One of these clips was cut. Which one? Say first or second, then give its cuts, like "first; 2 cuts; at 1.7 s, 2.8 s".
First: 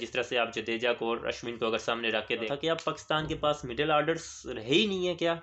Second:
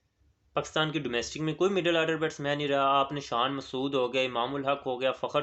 first; 1 cut; at 2.5 s